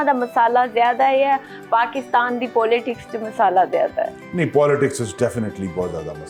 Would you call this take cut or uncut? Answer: uncut